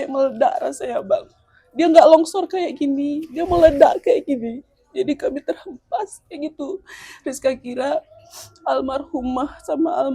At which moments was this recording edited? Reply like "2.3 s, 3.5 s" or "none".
none